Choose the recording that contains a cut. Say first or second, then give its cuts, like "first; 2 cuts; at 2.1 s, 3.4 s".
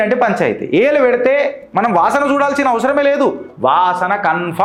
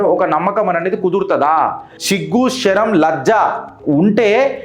second; 1 cut; at 1.9 s